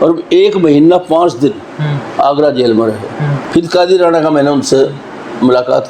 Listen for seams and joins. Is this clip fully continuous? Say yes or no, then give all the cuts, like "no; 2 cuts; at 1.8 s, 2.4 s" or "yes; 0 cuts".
no; 1 cut; at 3.3 s